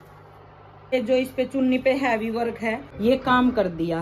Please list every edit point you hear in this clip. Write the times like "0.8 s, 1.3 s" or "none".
0.9 s, 2.8 s

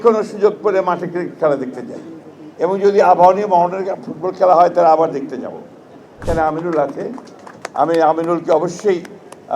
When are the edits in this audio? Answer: 6.1 s

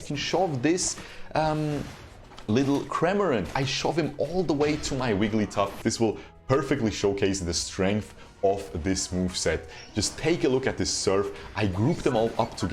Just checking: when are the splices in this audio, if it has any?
5.8 s

